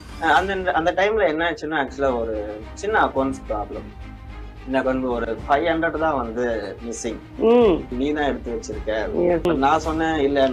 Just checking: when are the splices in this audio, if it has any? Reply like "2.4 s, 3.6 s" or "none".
7.9 s, 9.5 s